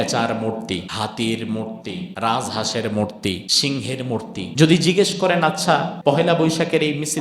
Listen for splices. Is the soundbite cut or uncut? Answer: cut